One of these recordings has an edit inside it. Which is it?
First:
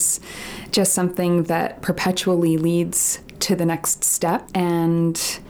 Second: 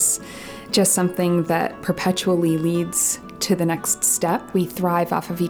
second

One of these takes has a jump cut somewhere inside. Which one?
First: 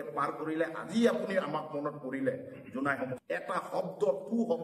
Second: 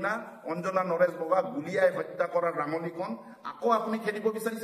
first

